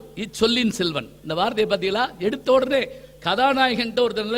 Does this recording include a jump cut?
no; 0 cuts

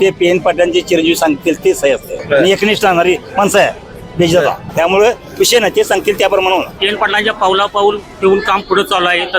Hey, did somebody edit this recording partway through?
yes; 3 cuts; at 2.1 s, 4.6 s, 6.8 s

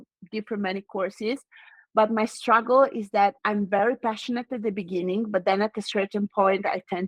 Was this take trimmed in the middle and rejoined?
no; 0 cuts

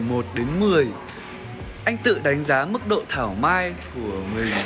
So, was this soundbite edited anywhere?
no; 0 cuts

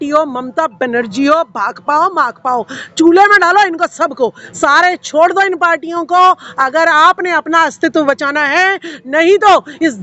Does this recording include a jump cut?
no; 0 cuts

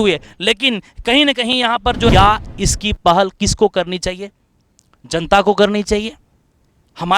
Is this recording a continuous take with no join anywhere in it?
no; 1 cut; at 2.1 s

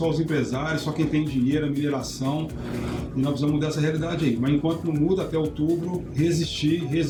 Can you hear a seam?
no; 0 cuts

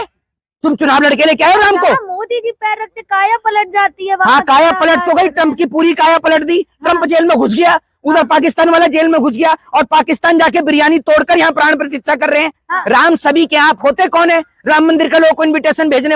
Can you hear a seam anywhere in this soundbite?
yes; 1 cut; at 12.7 s

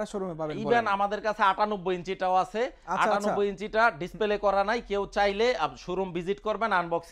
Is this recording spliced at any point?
no; 0 cuts

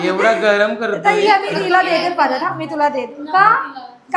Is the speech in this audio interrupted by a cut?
no; 0 cuts

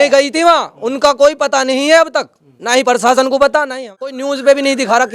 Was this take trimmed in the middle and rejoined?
yes; 1 cut; at 4.2 s

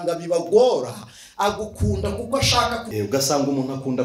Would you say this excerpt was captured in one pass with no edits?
no; 1 cut; at 2.9 s

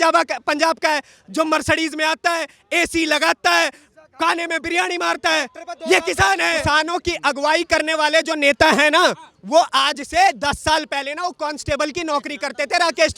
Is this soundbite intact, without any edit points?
no; 1 cut; at 6.6 s

